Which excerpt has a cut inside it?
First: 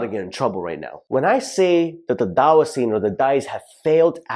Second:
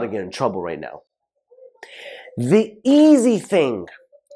first; 1 cut; at 0.9 s

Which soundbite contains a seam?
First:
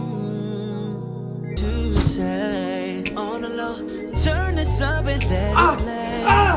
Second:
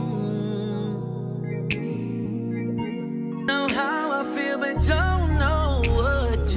first; 1 cut; at 1.5 s

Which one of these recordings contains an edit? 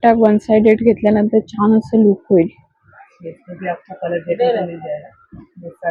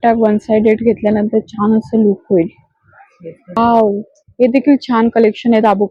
second; 1 cut; at 3.6 s

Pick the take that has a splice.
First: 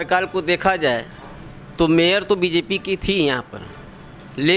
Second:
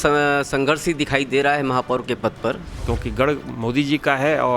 second; 1 cut; at 2.7 s

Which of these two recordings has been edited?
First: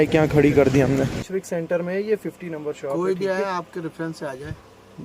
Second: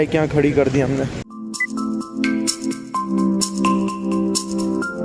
first; 1 cut; at 1.3 s

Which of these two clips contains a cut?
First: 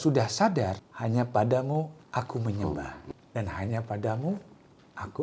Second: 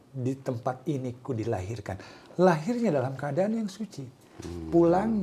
first; 3 cuts; at 0.9 s, 2.0 s, 3.0 s

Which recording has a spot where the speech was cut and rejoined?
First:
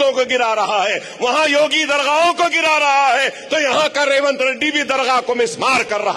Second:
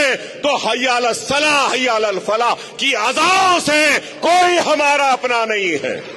first; 1 cut; at 5.2 s

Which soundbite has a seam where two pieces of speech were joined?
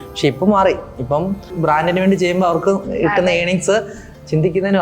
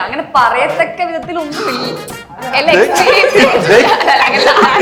first; 1 cut; at 1.6 s

